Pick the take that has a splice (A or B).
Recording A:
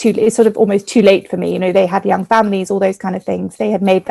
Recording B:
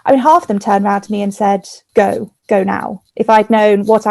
B